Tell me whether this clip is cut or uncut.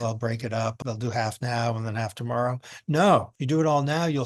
cut